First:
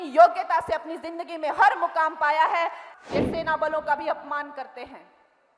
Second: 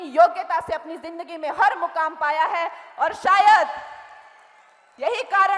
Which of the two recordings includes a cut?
first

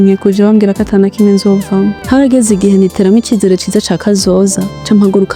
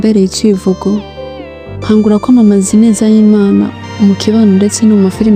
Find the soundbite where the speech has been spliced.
first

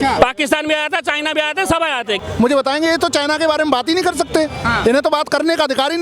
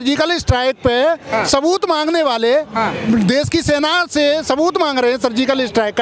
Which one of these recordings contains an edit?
first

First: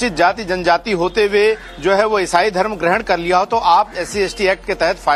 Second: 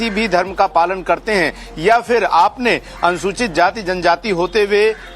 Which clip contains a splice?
second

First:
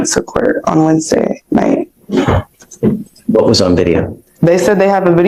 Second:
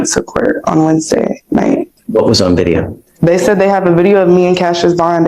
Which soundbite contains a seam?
second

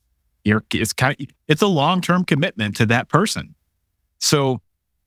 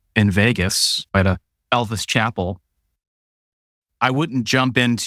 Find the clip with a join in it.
second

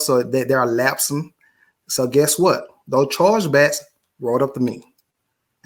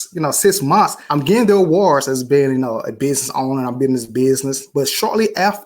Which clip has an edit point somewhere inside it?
second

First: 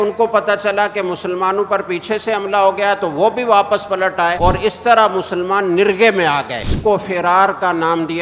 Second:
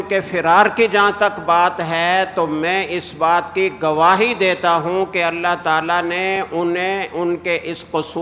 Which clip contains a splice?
first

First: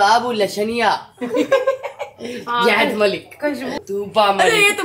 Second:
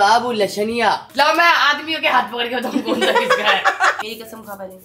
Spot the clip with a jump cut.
second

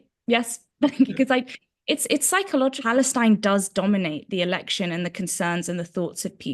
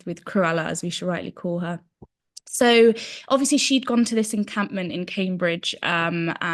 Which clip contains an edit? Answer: first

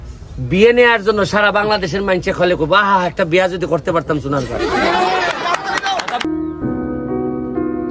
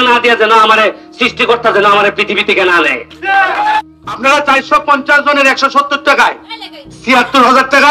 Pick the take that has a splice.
first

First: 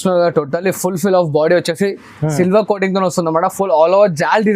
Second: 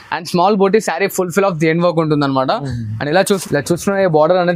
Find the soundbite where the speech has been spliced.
second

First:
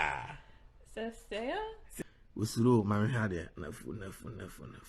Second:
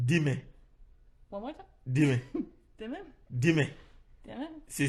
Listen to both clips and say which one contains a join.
first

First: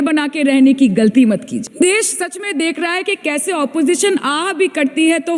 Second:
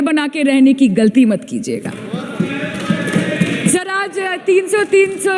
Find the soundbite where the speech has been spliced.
first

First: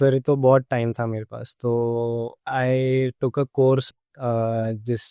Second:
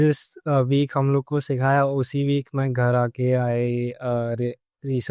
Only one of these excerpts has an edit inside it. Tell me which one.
first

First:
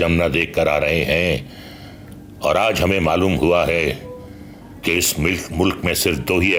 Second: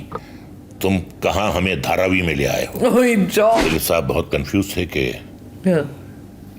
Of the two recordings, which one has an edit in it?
second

